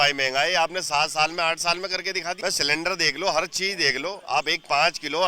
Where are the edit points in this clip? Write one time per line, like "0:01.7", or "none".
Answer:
0:02.4